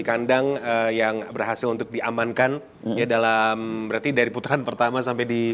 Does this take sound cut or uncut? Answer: uncut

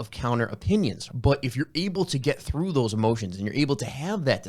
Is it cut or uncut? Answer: cut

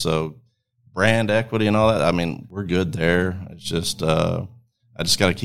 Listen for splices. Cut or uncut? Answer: cut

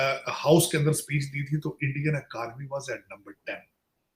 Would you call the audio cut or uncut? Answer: uncut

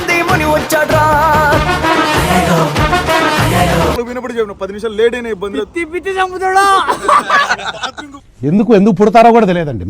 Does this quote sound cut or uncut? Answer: cut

